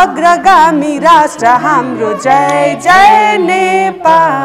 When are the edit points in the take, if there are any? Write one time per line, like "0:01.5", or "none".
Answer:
none